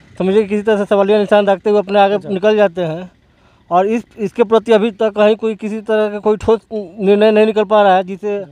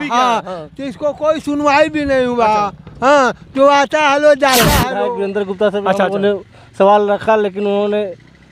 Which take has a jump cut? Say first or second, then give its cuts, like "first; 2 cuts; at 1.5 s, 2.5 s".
second; 1 cut; at 4.9 s